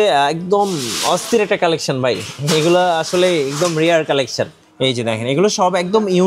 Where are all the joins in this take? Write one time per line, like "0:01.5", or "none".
0:04.6